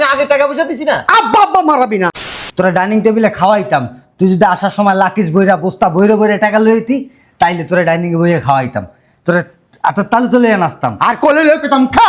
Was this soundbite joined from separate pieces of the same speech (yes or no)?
yes